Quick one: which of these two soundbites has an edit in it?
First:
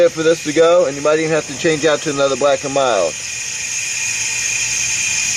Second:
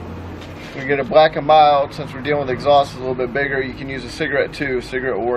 second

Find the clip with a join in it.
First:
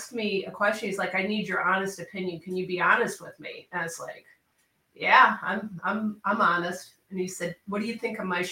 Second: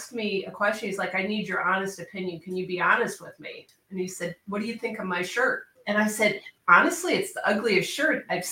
second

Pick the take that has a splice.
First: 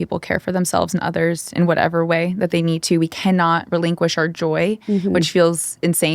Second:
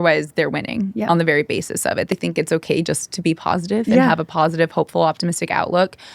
second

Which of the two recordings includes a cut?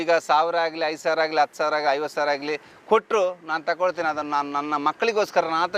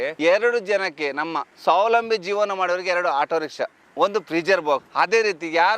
second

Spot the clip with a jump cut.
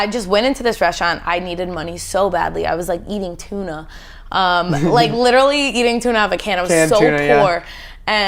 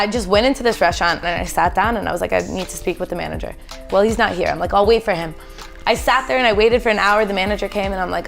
second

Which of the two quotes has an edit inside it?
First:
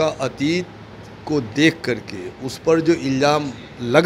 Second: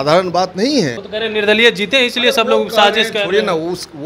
second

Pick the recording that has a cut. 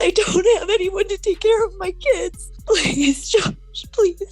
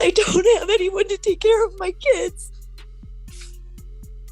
first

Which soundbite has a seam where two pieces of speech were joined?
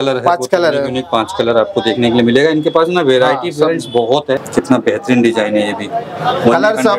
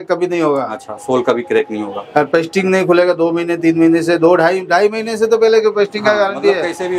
first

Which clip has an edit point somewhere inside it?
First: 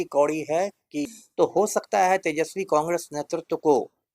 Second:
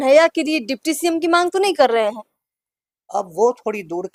first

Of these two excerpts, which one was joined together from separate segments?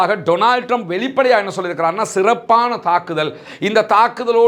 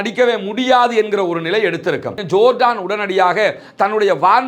second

